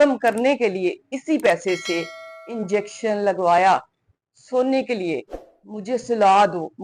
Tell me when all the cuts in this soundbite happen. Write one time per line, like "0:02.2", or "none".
none